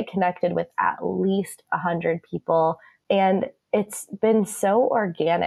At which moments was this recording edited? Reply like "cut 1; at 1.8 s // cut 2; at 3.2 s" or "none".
cut 1; at 2.5 s